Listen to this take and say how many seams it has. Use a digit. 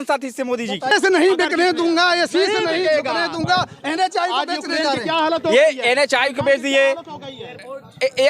1